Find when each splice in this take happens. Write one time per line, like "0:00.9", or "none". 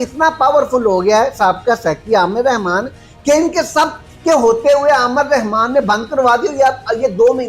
none